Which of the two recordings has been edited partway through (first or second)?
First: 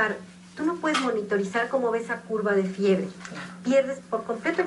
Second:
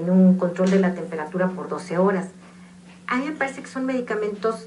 second